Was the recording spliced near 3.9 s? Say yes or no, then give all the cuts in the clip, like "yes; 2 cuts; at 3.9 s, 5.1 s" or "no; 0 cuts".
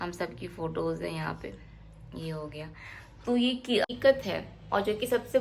yes; 1 cut; at 3.9 s